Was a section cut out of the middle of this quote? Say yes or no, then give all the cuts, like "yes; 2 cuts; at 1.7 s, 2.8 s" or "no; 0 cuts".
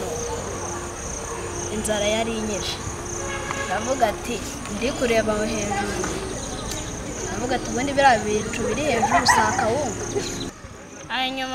yes; 1 cut; at 10.5 s